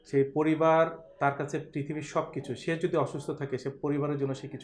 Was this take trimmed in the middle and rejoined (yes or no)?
no